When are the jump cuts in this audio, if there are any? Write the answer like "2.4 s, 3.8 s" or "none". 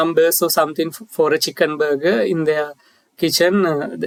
none